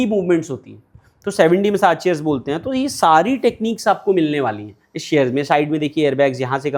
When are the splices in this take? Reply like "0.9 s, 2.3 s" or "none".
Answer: none